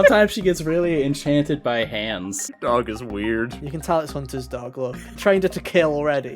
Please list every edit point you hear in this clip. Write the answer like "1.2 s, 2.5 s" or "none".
2.5 s, 5.1 s